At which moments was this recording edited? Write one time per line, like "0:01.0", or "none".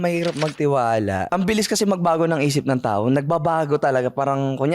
0:01.2